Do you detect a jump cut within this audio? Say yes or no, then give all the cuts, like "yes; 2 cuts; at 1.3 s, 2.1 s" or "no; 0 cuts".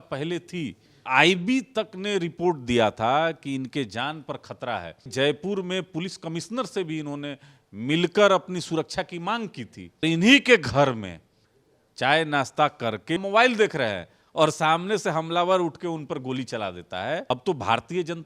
yes; 5 cuts; at 1.0 s, 5.1 s, 10.0 s, 13.2 s, 17.3 s